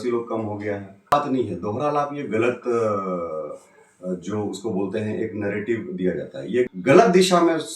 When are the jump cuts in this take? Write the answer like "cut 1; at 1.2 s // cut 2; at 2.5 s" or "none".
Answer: cut 1; at 1.1 s // cut 2; at 6.7 s